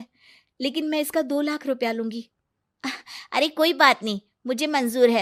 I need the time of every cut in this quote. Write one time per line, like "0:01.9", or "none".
none